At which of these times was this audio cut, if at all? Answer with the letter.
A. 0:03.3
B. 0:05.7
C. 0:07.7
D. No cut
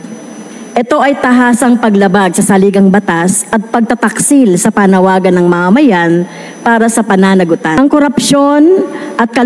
C